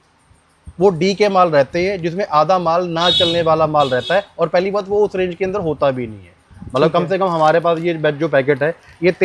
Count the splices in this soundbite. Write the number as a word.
zero